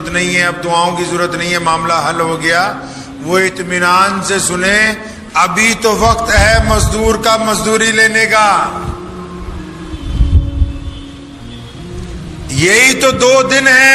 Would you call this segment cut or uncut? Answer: uncut